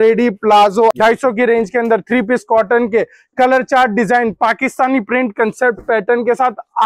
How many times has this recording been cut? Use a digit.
1